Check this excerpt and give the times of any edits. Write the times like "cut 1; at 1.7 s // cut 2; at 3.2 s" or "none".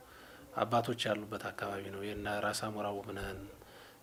none